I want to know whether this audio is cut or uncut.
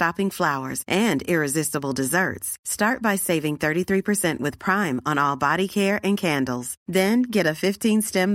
uncut